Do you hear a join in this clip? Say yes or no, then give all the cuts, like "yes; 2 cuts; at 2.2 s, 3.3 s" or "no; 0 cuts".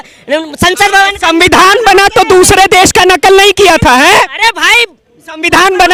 no; 0 cuts